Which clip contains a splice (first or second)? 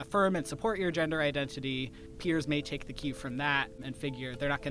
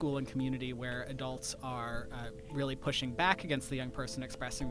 first